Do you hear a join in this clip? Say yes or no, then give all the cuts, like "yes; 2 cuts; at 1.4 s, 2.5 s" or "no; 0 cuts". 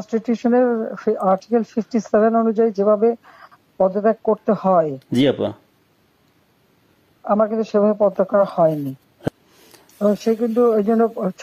yes; 1 cut; at 9.3 s